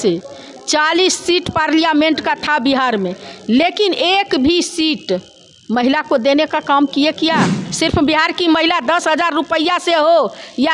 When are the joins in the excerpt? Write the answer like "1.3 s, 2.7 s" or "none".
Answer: 7.7 s